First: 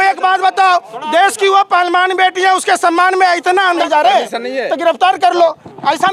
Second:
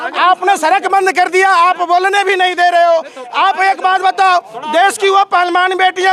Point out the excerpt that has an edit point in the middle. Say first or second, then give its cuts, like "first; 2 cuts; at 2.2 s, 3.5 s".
first; 1 cut; at 3.8 s